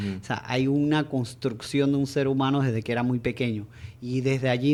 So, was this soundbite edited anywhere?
no; 0 cuts

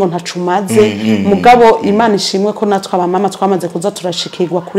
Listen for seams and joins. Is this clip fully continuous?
yes; 0 cuts

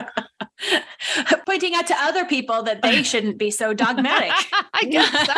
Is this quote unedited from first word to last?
no; 1 cut; at 1.4 s

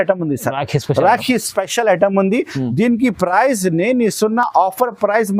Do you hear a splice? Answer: no; 0 cuts

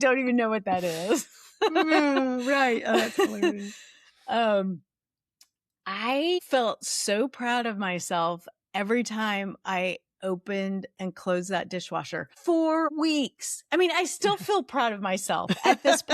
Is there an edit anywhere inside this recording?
yes; 3 cuts; at 6.4 s, 12.2 s, 12.9 s

